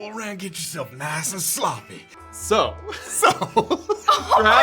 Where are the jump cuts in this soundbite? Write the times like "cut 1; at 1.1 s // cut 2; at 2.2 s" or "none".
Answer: cut 1; at 2.1 s